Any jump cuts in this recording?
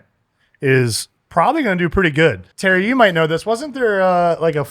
yes; 1 cut; at 2.5 s

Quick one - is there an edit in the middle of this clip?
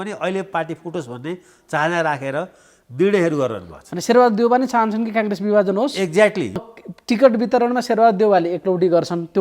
yes; 1 cut; at 6.6 s

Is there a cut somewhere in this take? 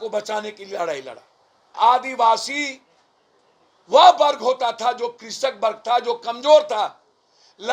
yes; 1 cut; at 1.7 s

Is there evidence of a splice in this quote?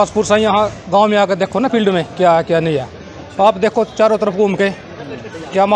no; 0 cuts

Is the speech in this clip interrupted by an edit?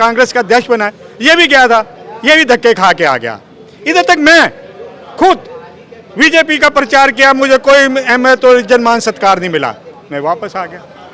no; 0 cuts

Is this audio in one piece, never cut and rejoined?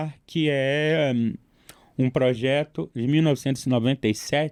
yes; 0 cuts

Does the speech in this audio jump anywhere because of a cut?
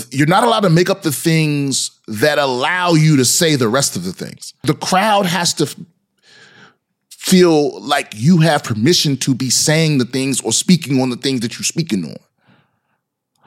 yes; 1 cut; at 4.5 s

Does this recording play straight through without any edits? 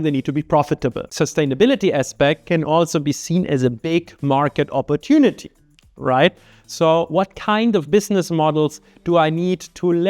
no; 1 cut; at 1.1 s

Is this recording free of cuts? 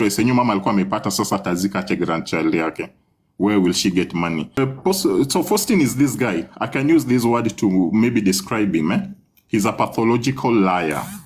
no; 1 cut; at 4.6 s

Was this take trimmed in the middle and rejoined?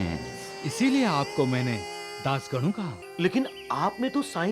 yes; 1 cut; at 3.0 s

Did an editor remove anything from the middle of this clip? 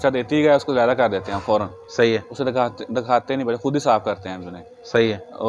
no; 0 cuts

